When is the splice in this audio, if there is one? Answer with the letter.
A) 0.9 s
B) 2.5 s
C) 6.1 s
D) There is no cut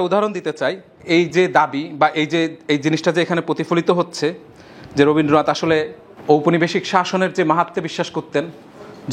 A